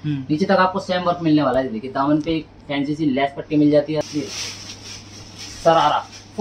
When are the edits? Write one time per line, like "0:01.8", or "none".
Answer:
0:04.0